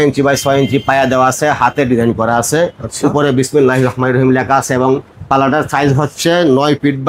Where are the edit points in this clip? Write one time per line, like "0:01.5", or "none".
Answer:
none